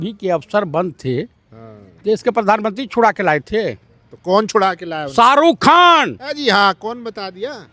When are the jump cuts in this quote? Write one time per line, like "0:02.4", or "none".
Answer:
none